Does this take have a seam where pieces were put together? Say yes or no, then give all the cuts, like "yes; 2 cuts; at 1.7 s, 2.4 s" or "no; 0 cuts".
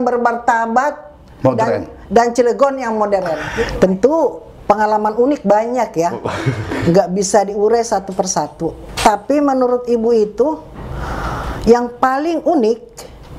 yes; 1 cut; at 3.5 s